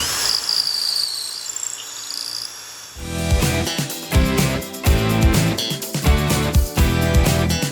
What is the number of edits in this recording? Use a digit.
1